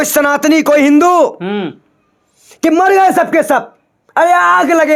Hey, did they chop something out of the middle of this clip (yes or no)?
no